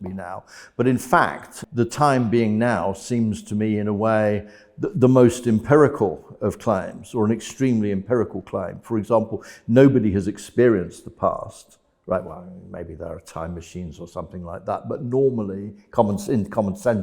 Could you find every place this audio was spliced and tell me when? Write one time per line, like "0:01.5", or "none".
0:01.5